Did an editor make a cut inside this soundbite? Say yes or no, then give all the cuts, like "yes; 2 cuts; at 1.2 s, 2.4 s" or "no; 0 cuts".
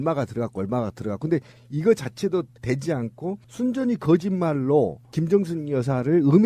yes; 1 cut; at 3.3 s